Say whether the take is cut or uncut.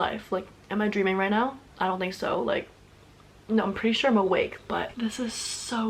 uncut